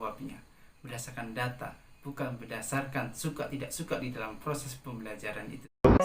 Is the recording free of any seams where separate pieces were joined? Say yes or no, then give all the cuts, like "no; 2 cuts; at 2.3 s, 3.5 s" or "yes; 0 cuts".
yes; 0 cuts